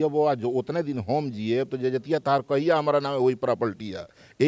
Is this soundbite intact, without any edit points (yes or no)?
yes